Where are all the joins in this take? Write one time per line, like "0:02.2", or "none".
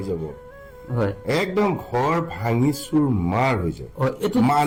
none